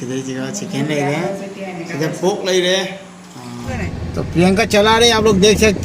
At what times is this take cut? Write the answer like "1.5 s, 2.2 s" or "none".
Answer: 3.7 s